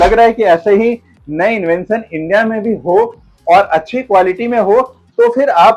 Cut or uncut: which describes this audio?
uncut